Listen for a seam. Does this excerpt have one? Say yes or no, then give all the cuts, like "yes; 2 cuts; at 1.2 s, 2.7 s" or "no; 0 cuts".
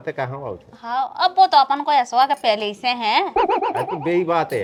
no; 0 cuts